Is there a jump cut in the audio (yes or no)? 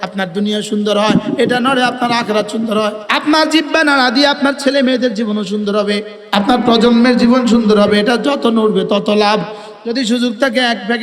yes